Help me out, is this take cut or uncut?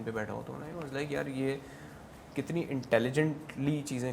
uncut